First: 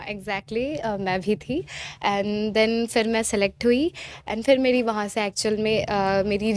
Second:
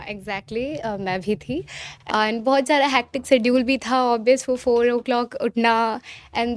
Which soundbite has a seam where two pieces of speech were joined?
second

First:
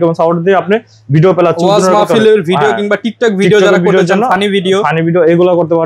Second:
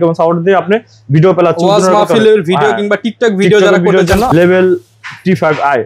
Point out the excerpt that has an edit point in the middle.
second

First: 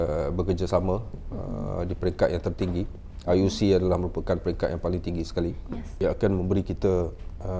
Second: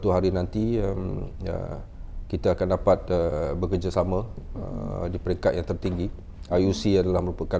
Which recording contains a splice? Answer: first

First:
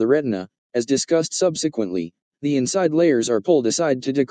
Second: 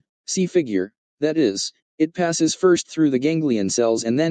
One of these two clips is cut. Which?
first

